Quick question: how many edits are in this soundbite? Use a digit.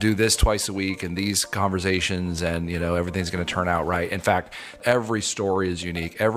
1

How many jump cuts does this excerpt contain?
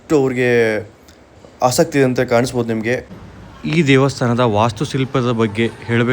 1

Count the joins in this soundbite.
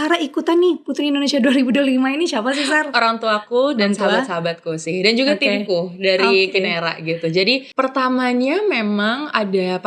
1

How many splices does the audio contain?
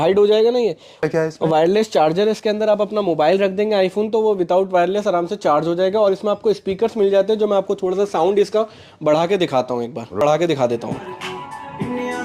2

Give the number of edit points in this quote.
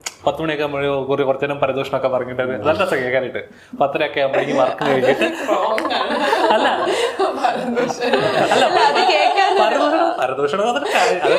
0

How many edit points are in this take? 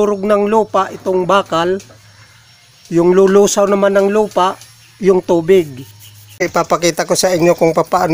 1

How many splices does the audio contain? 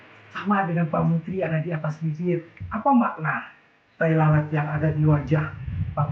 1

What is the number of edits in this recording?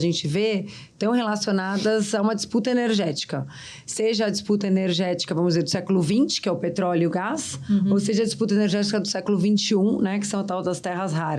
0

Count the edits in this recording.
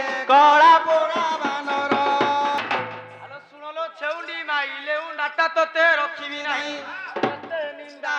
1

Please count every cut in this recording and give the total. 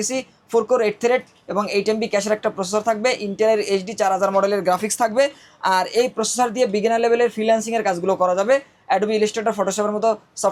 0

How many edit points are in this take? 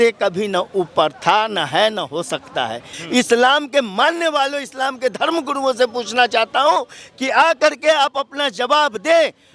1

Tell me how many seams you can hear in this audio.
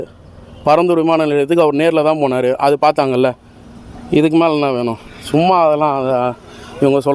0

